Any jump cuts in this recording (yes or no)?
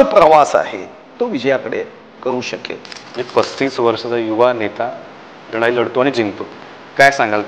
yes